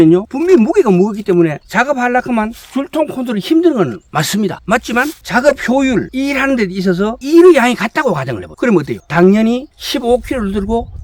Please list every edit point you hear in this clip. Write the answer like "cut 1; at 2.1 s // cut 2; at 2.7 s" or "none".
none

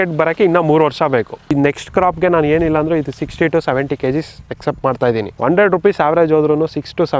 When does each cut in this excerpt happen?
cut 1; at 1.5 s // cut 2; at 4.4 s // cut 3; at 5.3 s

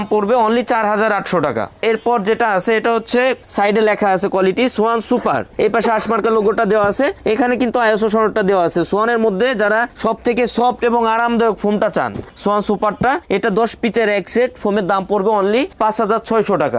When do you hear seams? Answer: none

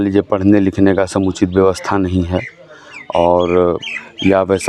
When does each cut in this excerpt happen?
none

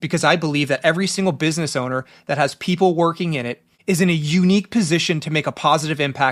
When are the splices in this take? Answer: none

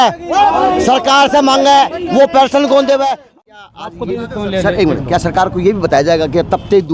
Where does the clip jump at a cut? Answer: cut 1; at 3.2 s

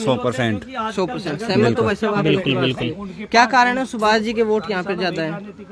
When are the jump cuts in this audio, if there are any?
none

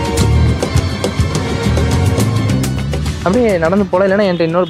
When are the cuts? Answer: cut 1; at 3.1 s

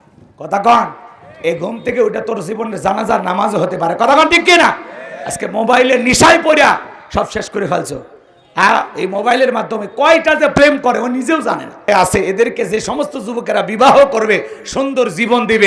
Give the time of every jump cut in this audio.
cut 1; at 11.9 s

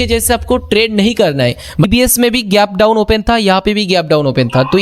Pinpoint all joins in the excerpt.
cut 1; at 1.8 s

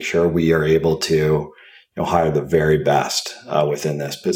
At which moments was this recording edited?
none

